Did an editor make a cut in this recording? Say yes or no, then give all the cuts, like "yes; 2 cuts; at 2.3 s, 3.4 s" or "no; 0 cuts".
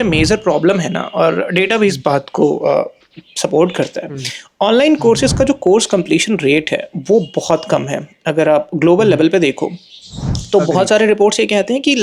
no; 0 cuts